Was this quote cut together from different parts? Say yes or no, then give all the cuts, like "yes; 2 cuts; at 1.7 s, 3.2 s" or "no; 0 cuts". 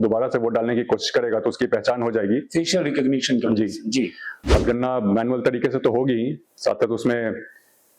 yes; 1 cut; at 4.6 s